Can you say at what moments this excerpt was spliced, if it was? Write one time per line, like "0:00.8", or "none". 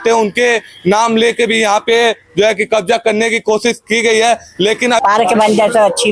0:05.0